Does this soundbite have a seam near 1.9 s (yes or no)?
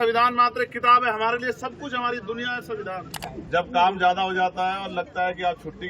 no